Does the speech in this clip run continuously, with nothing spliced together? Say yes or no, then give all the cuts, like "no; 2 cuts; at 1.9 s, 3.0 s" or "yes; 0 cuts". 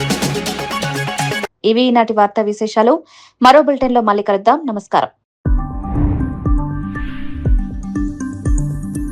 yes; 0 cuts